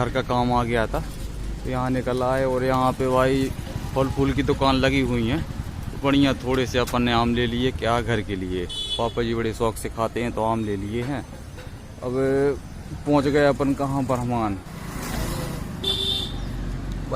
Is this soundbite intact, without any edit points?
no; 1 cut; at 14.6 s

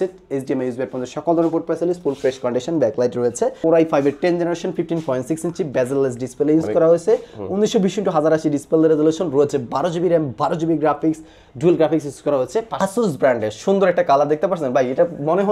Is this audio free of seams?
no; 2 cuts; at 3.6 s, 12.7 s

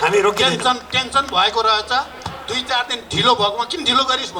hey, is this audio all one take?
yes; 0 cuts

